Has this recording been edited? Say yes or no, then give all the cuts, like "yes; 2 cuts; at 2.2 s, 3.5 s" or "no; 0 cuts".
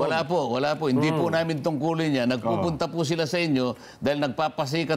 no; 0 cuts